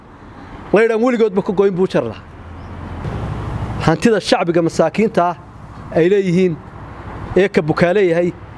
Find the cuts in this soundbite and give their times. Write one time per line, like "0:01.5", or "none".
0:03.0